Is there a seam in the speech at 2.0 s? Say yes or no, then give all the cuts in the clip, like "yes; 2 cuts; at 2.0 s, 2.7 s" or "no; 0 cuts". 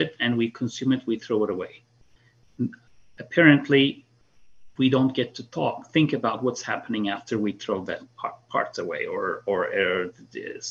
no; 0 cuts